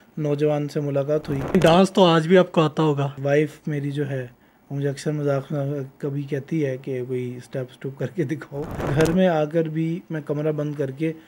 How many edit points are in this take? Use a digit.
3